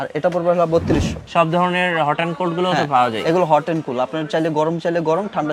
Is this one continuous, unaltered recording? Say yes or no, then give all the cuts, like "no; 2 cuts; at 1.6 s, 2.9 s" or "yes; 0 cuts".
no; 1 cut; at 1.2 s